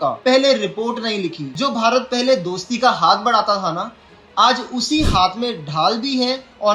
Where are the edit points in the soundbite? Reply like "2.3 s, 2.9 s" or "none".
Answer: 1.4 s

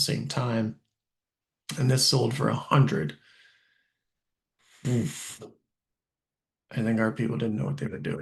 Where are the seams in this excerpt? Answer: none

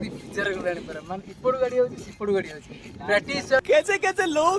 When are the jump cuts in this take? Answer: 3.6 s

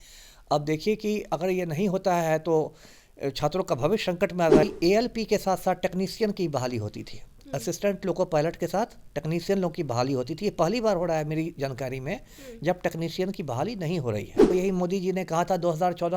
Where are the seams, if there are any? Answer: 4.6 s, 14.4 s

